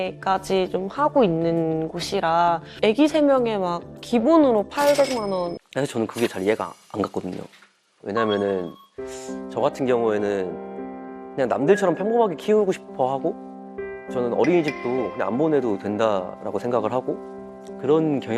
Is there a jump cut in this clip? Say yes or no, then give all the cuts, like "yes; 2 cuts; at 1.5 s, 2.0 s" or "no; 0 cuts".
yes; 1 cut; at 5.6 s